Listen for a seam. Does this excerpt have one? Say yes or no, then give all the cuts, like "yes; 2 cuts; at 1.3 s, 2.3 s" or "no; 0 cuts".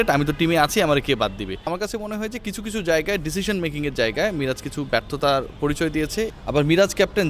yes; 2 cuts; at 1.7 s, 6.3 s